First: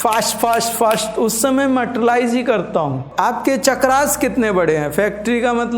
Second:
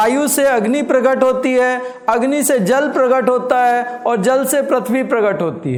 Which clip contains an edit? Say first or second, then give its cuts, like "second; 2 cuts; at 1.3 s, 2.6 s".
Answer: first; 1 cut; at 3.1 s